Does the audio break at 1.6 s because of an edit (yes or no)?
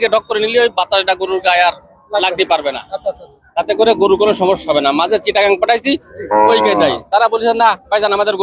no